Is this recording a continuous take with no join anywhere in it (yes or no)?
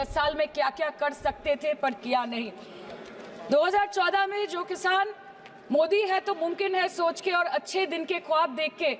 yes